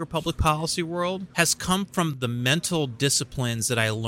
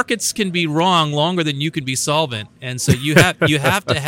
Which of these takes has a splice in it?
first; 2 cuts; at 1.3 s, 2.1 s

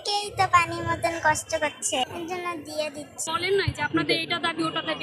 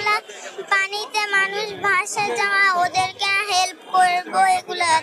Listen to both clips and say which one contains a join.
first; 1 cut; at 3.2 s

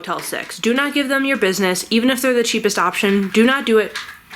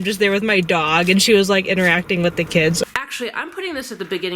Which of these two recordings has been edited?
second; 1 cut; at 2.9 s

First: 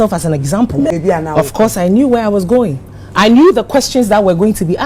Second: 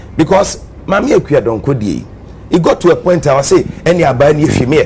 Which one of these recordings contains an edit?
first; 1 cut; at 0.9 s

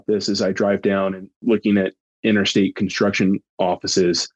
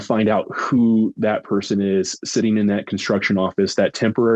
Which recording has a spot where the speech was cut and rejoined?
first; 2 cuts; at 2.2 s, 3.5 s

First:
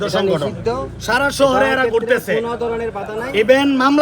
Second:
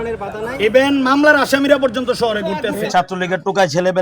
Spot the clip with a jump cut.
second; 1 cut; at 2.8 s

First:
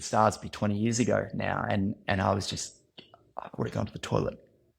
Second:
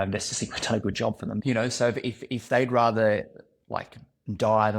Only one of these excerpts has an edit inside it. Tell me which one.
second; 1 cut; at 1.6 s

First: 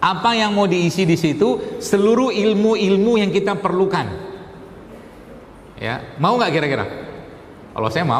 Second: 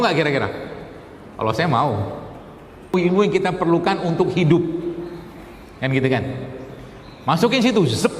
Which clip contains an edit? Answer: second; 1 cut; at 2.9 s

